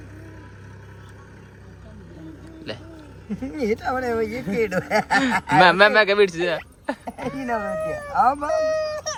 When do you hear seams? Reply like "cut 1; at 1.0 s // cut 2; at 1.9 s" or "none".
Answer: none